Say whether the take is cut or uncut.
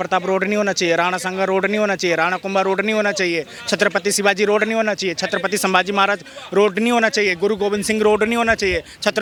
uncut